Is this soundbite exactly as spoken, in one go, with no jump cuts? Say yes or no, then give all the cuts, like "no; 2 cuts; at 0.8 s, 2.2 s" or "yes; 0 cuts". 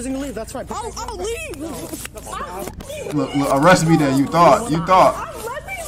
yes; 0 cuts